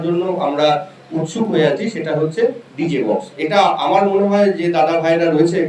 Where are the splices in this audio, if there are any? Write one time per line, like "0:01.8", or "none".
none